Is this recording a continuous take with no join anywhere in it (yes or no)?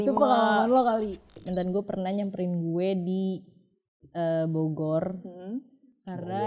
no